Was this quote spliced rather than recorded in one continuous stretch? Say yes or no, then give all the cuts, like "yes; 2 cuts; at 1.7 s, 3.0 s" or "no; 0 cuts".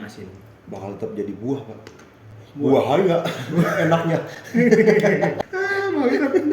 yes; 1 cut; at 5.4 s